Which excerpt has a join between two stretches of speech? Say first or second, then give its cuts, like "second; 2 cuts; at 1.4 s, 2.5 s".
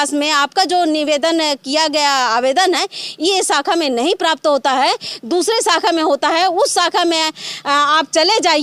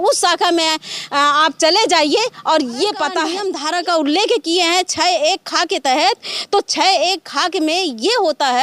second; 1 cut; at 3.4 s